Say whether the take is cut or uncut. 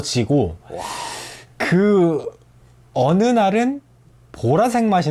uncut